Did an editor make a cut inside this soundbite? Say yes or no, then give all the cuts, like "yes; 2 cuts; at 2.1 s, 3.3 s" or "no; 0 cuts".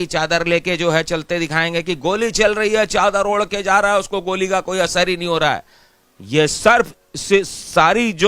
no; 0 cuts